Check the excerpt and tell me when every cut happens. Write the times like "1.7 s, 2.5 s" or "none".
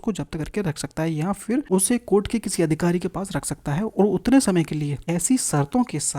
1.7 s, 5.0 s